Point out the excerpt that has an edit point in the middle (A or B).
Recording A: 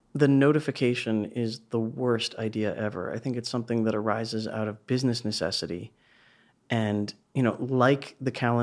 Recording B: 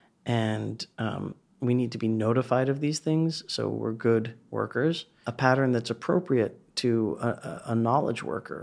B